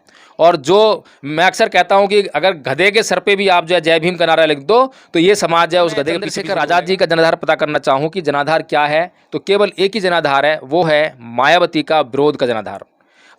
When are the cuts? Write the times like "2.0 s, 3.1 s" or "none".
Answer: 6.3 s

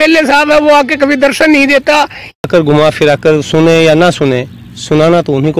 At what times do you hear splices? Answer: 2.4 s

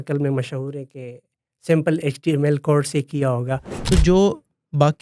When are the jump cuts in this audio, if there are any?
3.7 s

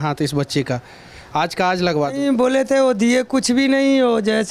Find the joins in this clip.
2.2 s

